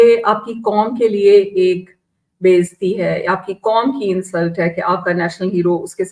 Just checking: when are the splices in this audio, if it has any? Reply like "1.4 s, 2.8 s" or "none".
none